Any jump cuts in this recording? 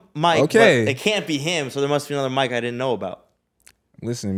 no; 0 cuts

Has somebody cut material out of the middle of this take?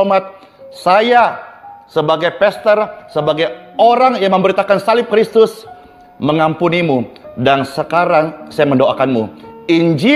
no; 0 cuts

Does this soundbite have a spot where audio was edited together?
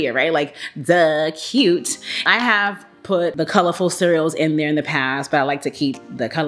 yes; 1 cut; at 2.1 s

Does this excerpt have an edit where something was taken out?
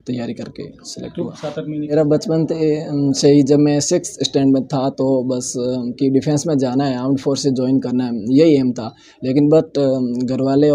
yes; 1 cut; at 1.9 s

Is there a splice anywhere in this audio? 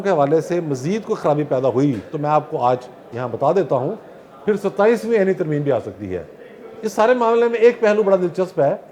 no; 0 cuts

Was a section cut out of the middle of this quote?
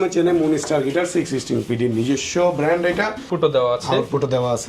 yes; 1 cut; at 3.3 s

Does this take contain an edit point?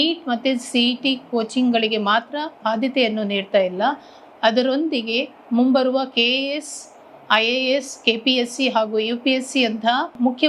no; 0 cuts

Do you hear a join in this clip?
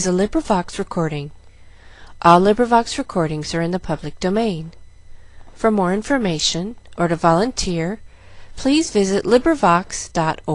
no; 0 cuts

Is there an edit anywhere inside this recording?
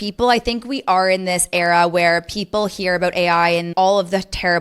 yes; 1 cut; at 3.7 s

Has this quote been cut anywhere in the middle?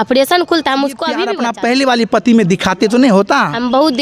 yes; 1 cut; at 1.3 s

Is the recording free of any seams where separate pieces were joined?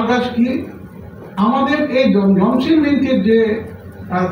yes; 0 cuts

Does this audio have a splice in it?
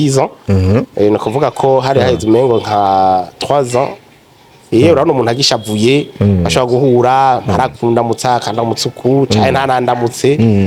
no; 0 cuts

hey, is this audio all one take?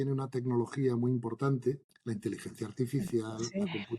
no; 1 cut; at 1.9 s

